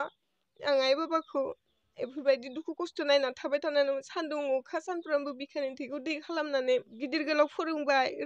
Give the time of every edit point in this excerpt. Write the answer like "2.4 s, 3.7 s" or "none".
7.0 s